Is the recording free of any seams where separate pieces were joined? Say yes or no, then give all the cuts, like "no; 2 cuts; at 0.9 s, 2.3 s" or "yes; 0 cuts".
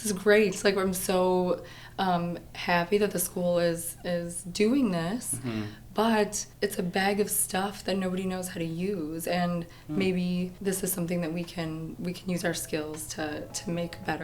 no; 3 cuts; at 6.4 s, 10.5 s, 11.9 s